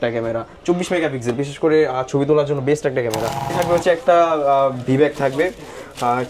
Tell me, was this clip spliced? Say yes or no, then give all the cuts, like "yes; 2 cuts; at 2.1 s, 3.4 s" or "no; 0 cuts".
yes; 1 cut; at 3.5 s